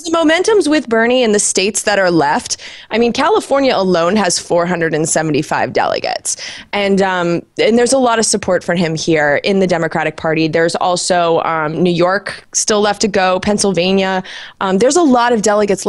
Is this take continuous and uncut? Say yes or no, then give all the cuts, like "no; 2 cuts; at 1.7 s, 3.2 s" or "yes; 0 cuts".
yes; 0 cuts